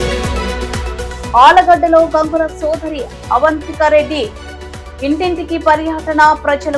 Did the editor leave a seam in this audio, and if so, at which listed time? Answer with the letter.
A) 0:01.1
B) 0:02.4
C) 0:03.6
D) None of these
A